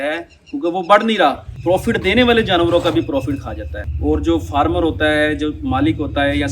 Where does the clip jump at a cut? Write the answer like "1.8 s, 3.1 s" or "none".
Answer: none